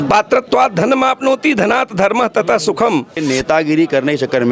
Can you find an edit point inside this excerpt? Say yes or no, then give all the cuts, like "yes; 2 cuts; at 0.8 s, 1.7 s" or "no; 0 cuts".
yes; 1 cut; at 3.2 s